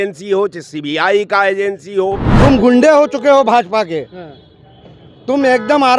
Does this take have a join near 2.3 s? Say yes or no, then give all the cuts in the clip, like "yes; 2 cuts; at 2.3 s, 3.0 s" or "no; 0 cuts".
yes; 1 cut; at 2.3 s